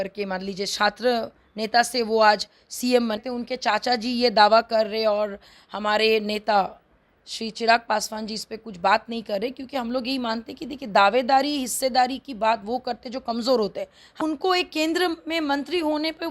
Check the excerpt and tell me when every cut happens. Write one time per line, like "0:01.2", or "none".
0:03.2
0:14.2